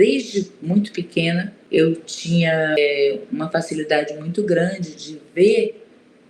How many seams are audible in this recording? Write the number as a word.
two